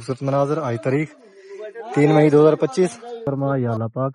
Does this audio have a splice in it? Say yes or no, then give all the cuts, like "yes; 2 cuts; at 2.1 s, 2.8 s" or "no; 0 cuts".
yes; 1 cut; at 3.2 s